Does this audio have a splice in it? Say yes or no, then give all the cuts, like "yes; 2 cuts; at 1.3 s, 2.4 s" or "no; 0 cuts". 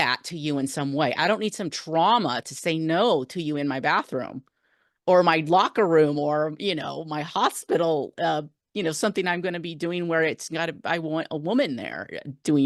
no; 0 cuts